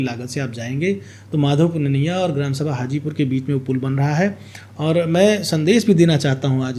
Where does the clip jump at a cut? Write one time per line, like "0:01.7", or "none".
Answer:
none